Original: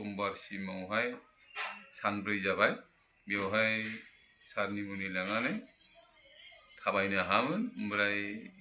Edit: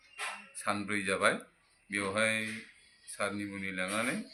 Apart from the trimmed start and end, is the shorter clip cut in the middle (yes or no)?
no